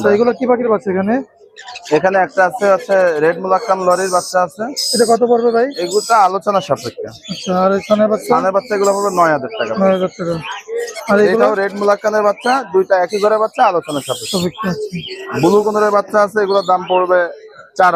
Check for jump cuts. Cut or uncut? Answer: uncut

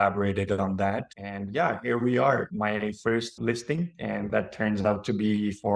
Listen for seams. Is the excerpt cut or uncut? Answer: cut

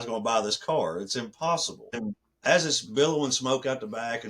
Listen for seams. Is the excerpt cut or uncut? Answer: cut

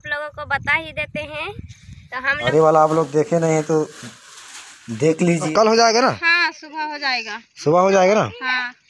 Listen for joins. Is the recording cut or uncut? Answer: cut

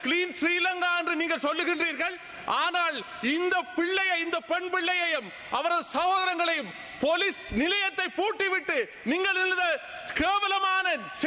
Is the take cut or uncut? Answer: uncut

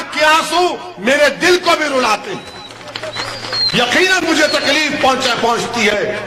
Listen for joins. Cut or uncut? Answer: uncut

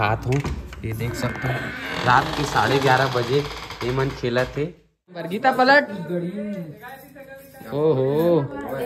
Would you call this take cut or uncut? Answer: cut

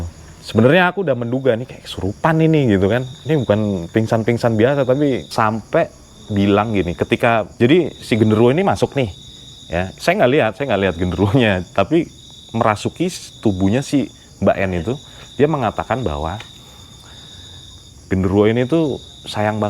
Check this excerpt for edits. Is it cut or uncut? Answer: cut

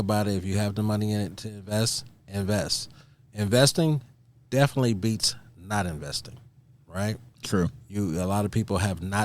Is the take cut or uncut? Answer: cut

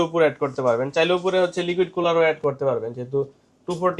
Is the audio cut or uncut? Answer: uncut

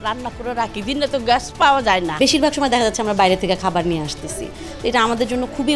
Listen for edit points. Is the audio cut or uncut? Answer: cut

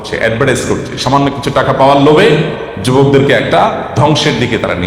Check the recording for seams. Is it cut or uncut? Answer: uncut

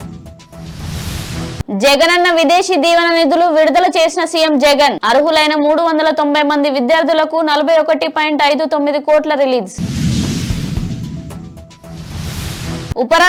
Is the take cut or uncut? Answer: uncut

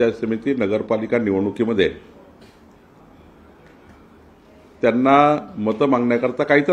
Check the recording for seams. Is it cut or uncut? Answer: uncut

